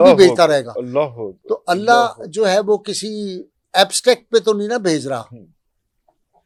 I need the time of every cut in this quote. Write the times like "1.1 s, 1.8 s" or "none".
none